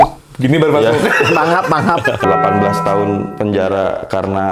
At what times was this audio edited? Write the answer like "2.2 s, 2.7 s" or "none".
2.3 s